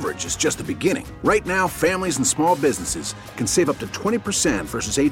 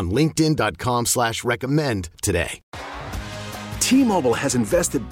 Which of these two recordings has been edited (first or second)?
second